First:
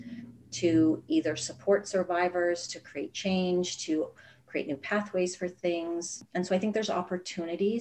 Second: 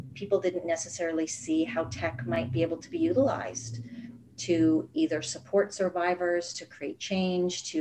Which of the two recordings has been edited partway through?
first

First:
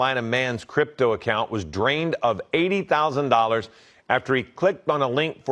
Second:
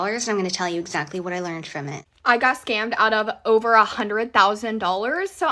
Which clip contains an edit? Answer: second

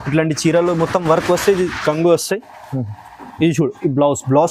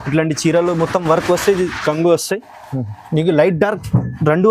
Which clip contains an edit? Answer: second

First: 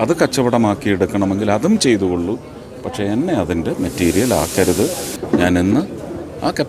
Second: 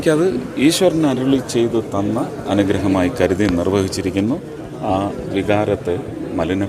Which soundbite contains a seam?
first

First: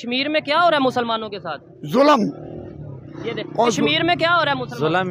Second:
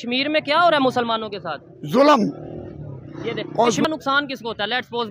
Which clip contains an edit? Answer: second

